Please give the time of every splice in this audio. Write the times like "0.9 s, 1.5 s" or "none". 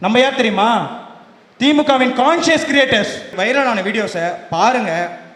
3.3 s

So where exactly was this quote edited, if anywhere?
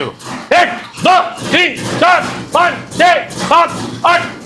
none

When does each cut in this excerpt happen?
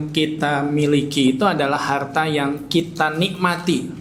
none

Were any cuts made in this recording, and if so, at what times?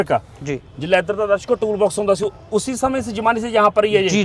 none

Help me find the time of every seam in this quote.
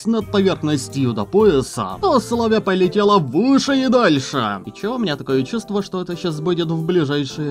1.8 s, 4.7 s

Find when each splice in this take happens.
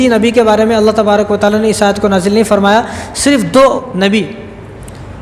none

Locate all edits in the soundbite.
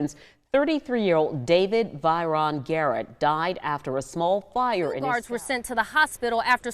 5.3 s

